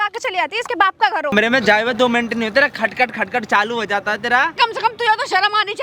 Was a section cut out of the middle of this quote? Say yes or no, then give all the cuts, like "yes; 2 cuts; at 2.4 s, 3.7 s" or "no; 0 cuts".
yes; 2 cuts; at 1.3 s, 4.5 s